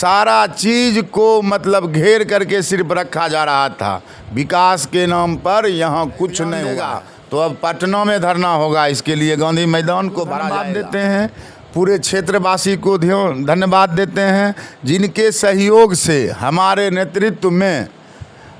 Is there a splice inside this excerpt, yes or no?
yes